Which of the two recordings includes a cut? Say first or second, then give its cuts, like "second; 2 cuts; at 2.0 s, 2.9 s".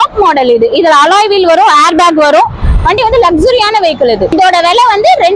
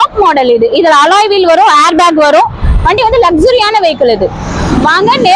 first; 1 cut; at 4.3 s